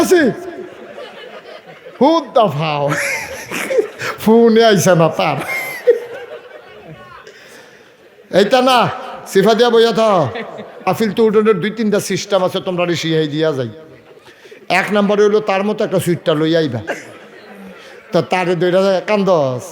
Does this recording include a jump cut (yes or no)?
yes